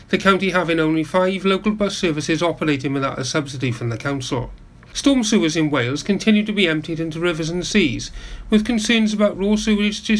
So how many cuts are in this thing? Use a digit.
1